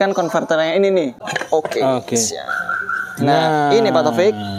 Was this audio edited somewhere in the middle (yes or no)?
yes